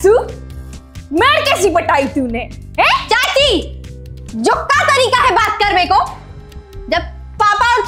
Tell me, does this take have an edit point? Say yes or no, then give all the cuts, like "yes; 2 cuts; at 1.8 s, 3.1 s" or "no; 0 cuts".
no; 0 cuts